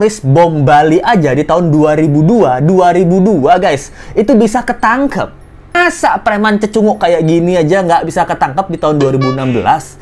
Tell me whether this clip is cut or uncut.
cut